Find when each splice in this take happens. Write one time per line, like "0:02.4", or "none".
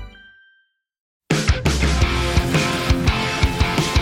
0:01.3